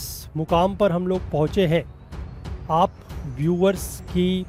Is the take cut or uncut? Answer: uncut